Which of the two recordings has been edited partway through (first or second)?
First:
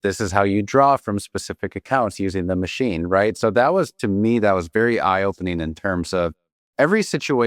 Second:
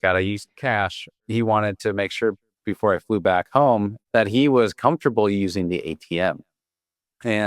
second